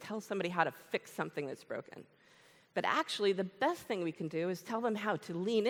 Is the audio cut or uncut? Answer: uncut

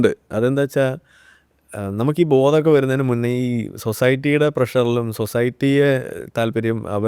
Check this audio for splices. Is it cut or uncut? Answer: uncut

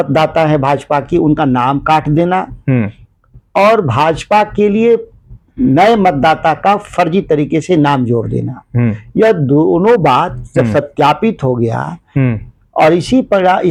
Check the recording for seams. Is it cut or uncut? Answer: uncut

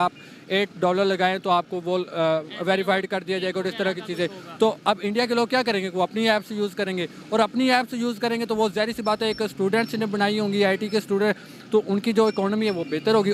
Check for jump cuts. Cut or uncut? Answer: uncut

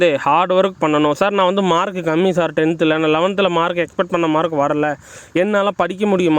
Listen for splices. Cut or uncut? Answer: uncut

